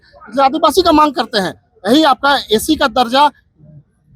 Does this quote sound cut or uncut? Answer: uncut